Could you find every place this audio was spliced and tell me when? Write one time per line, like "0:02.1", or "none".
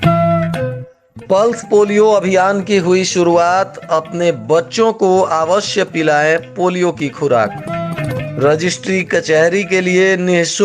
0:00.9